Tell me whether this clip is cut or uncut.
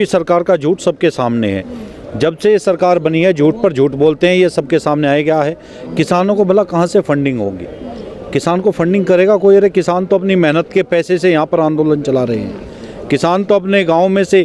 uncut